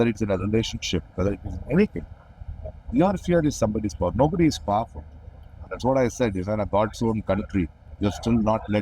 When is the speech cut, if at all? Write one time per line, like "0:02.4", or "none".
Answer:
0:05.7
0:07.8